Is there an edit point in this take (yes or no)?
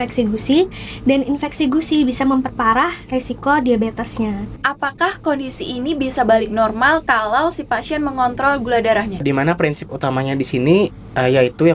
yes